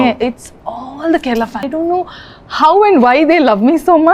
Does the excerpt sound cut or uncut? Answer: cut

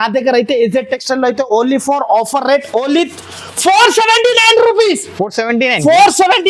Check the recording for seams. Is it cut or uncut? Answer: uncut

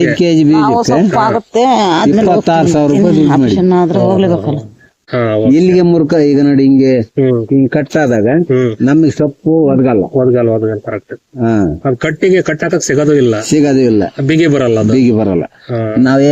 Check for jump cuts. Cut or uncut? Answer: cut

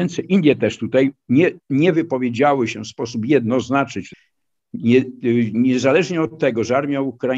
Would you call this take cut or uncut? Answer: cut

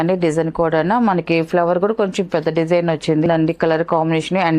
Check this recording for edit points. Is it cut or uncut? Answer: cut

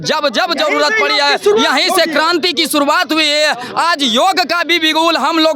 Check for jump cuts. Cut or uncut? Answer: uncut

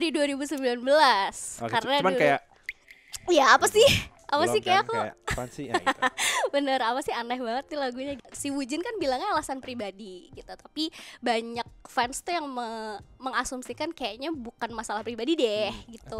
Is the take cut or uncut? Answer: cut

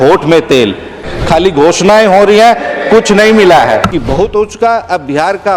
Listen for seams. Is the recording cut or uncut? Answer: cut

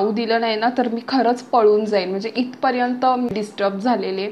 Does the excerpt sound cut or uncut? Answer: cut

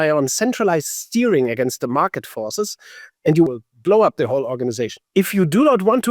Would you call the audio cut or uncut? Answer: cut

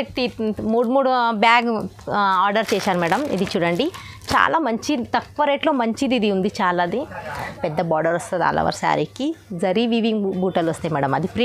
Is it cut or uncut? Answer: cut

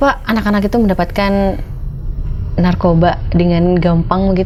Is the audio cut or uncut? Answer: uncut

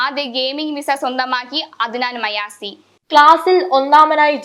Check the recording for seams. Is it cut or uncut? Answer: uncut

